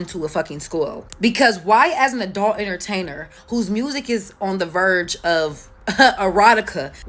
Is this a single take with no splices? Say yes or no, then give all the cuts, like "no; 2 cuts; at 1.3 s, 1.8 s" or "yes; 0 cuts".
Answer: yes; 0 cuts